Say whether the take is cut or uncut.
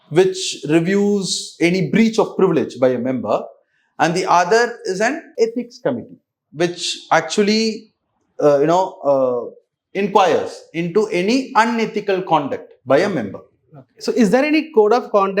uncut